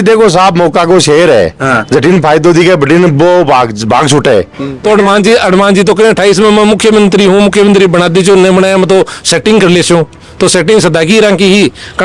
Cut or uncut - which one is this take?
cut